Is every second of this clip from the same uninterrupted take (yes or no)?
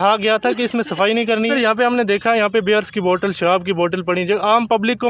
no